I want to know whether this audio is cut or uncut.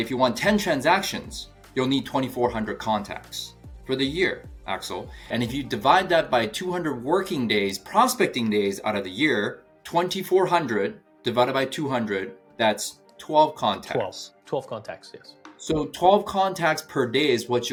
uncut